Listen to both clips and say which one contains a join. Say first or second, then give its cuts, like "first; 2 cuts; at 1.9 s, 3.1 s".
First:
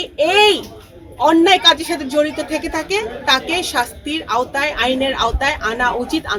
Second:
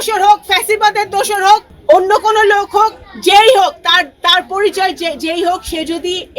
second; 1 cut; at 1.7 s